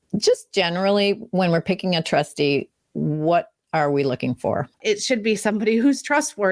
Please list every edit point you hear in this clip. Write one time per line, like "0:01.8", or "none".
0:04.8